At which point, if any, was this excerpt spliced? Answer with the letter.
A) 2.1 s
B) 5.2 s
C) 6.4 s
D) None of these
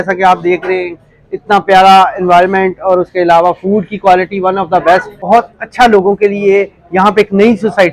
B